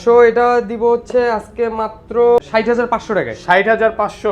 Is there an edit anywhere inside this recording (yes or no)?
yes